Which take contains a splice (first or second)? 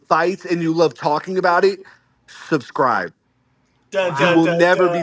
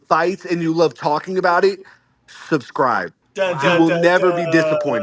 second